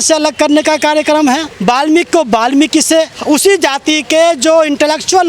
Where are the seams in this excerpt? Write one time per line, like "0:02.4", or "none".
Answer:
0:01.5
0:03.2